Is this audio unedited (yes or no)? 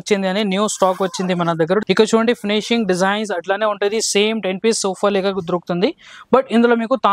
no